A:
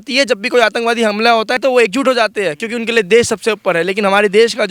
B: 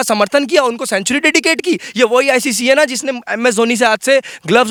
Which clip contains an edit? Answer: A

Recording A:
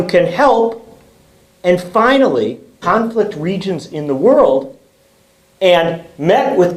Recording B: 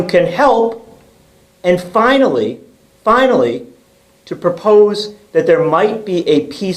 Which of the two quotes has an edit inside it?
B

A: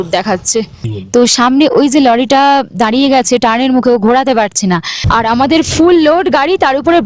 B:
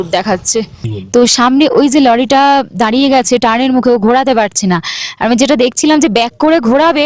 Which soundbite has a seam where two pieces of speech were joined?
A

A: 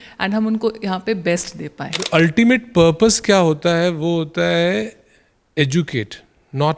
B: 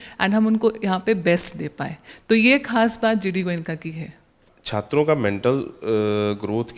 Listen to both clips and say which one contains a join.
A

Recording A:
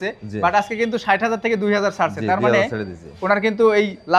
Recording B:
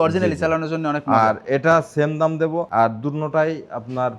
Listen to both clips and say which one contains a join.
B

